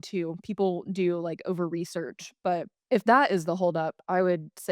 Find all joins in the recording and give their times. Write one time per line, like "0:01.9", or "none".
0:02.7